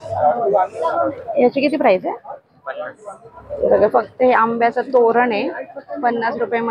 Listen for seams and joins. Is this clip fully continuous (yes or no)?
yes